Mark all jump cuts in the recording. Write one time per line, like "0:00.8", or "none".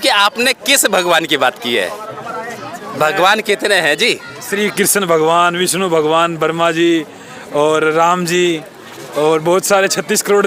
none

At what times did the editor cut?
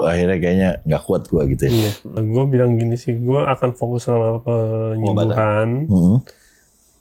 0:02.2

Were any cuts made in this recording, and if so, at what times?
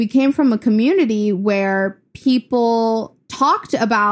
0:03.2

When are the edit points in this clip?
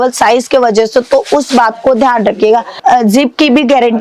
0:02.7

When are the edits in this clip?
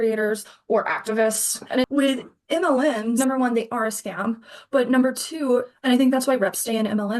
0:01.9
0:05.7

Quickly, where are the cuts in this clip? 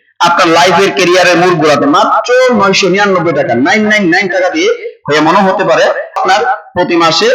0:06.2

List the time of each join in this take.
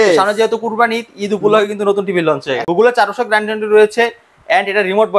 0:02.6

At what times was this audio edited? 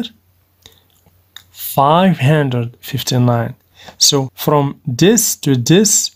0:00.9
0:04.3

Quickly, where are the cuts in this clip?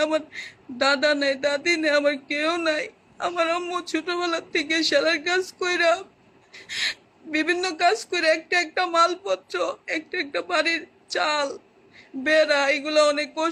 none

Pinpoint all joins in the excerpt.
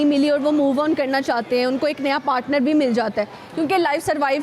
none

